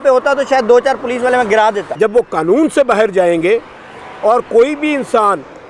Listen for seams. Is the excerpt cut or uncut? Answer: cut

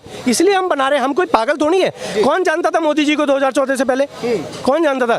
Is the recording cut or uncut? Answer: uncut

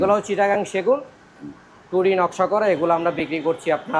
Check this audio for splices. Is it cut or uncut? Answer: uncut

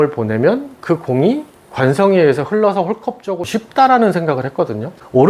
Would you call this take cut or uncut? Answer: cut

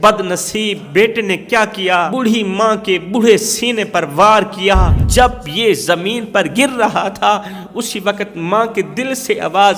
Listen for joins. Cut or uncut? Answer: cut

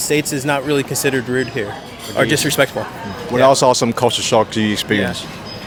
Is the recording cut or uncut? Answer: uncut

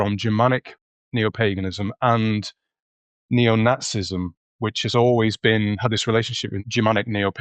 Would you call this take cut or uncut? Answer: cut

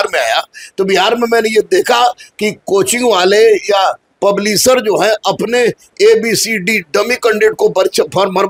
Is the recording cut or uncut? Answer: uncut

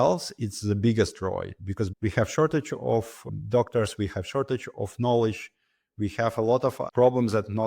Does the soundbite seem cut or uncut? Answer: cut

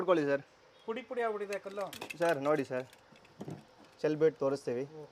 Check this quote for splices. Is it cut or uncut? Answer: uncut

